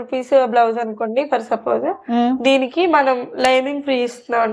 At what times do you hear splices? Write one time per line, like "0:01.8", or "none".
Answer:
none